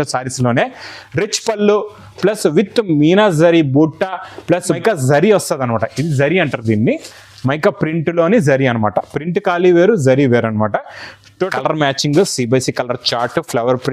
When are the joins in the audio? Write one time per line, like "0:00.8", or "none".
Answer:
0:04.8
0:11.5